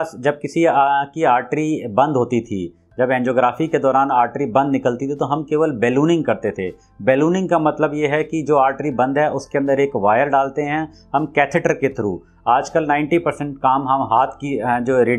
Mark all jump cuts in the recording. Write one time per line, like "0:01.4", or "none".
none